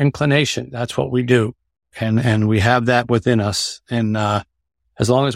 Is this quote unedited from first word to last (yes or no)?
yes